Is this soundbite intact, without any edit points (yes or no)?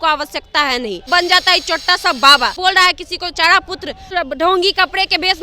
no